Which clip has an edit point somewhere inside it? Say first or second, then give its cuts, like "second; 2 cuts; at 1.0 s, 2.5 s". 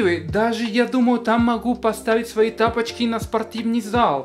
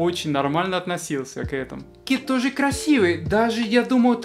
second; 1 cut; at 2.0 s